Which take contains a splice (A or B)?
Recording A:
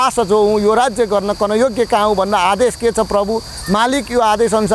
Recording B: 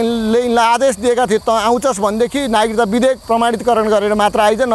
B